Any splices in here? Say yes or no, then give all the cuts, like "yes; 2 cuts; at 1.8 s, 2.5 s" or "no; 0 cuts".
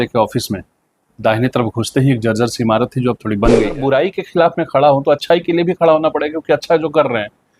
yes; 1 cut; at 3.8 s